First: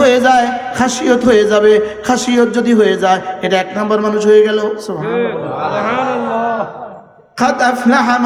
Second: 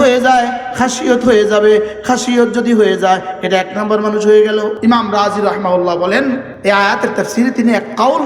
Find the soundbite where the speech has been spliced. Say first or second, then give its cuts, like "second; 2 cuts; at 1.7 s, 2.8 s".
second; 2 cuts; at 4.8 s, 6.5 s